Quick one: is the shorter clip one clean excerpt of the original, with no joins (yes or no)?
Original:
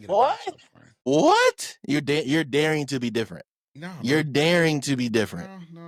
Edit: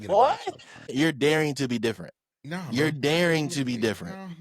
no